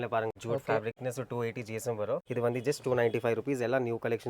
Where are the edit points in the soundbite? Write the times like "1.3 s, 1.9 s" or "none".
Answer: 0.8 s, 2.2 s